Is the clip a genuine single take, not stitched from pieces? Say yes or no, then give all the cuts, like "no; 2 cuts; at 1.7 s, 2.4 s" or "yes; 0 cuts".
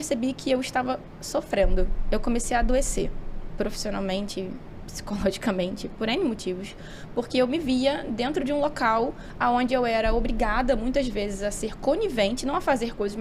yes; 0 cuts